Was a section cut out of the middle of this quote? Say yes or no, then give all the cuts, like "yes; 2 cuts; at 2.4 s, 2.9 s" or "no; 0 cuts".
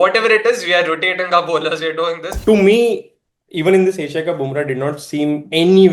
yes; 1 cut; at 2.3 s